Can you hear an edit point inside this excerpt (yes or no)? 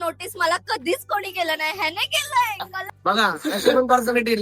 yes